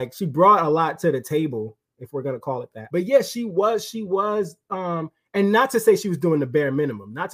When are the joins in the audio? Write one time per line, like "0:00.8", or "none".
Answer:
0:02.7